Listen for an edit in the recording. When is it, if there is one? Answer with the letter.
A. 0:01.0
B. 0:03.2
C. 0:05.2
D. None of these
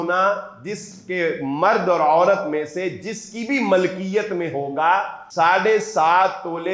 C